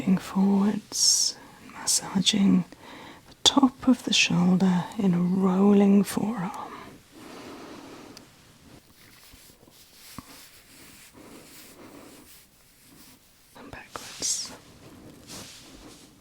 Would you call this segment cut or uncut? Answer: cut